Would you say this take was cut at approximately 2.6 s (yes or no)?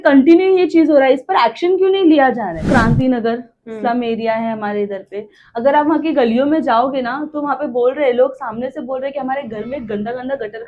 yes